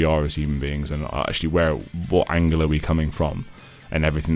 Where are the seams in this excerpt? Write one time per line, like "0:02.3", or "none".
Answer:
0:01.9